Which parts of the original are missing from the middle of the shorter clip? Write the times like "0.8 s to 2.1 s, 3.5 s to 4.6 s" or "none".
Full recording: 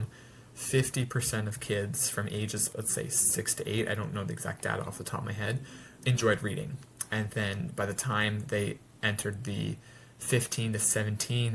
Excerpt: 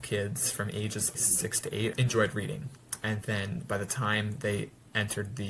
2.8 s to 5.3 s